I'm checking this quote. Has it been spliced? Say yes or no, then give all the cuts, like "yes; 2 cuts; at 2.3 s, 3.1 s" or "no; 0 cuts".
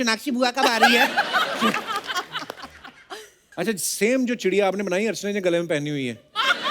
yes; 1 cut; at 3.4 s